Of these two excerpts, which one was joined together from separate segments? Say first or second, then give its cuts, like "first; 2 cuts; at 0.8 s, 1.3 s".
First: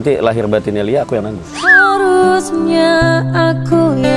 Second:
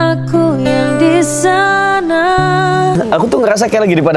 second; 1 cut; at 3.0 s